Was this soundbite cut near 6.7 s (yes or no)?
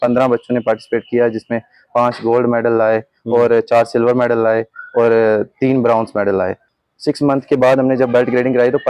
yes